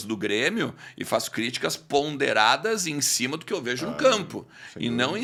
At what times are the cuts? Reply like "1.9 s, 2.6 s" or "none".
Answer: none